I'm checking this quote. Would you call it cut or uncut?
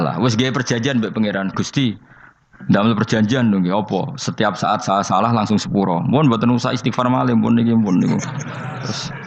uncut